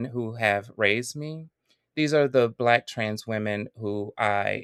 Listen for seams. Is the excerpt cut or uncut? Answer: uncut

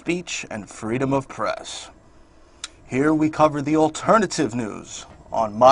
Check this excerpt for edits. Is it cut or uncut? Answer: cut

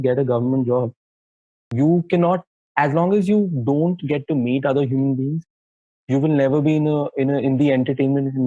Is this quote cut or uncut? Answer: cut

